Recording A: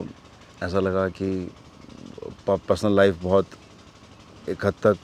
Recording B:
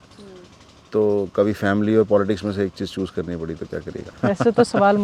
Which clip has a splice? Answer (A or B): B